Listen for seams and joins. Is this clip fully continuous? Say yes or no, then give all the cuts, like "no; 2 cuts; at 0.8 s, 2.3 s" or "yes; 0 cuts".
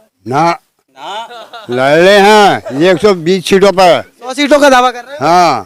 yes; 0 cuts